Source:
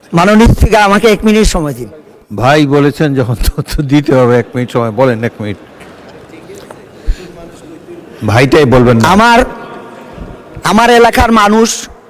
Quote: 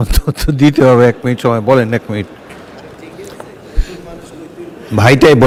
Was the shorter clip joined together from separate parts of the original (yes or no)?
no